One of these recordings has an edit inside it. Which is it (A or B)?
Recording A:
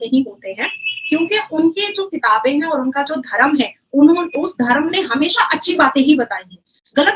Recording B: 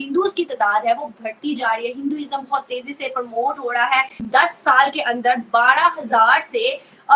B